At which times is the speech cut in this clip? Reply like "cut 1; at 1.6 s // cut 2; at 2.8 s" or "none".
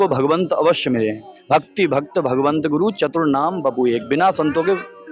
none

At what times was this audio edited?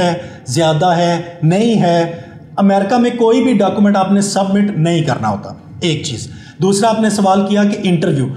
none

